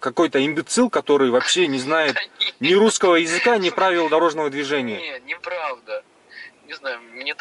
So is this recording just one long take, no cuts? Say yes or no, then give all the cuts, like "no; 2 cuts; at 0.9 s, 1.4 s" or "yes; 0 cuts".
yes; 0 cuts